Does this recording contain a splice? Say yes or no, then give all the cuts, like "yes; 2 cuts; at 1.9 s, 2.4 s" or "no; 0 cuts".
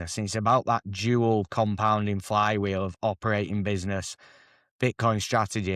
no; 0 cuts